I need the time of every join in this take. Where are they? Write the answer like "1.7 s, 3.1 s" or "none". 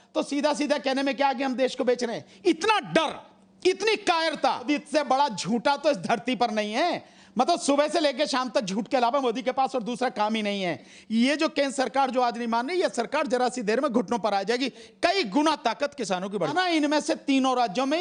4.6 s, 10.9 s, 16.4 s